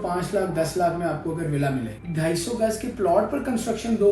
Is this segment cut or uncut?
cut